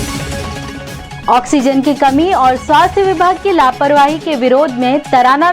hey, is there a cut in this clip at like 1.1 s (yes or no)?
yes